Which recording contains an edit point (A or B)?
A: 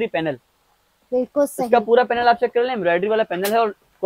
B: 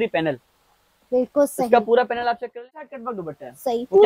B